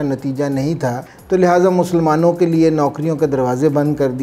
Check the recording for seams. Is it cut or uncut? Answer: cut